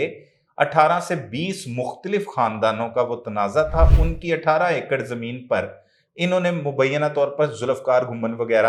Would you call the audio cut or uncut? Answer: uncut